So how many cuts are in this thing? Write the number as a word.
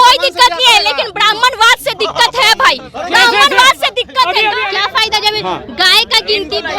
one